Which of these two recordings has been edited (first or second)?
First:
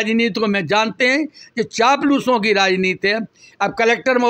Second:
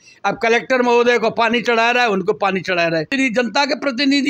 second